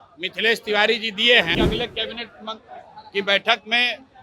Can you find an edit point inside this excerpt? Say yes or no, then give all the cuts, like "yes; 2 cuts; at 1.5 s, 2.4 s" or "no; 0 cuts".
yes; 1 cut; at 1.5 s